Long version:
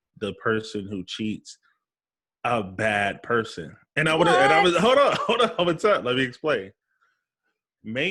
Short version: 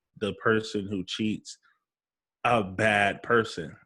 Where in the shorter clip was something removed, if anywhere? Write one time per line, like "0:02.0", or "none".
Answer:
none